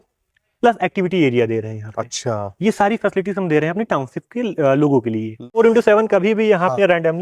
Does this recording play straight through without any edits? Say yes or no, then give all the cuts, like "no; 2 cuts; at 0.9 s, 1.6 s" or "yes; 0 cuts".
no; 1 cut; at 5.5 s